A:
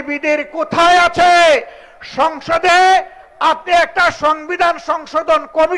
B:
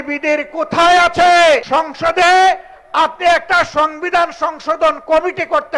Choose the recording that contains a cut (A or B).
B